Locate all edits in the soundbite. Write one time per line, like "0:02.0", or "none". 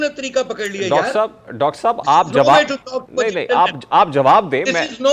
none

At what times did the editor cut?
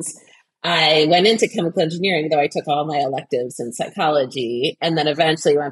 none

